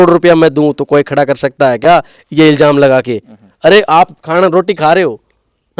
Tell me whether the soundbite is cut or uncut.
uncut